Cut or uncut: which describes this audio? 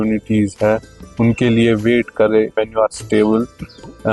cut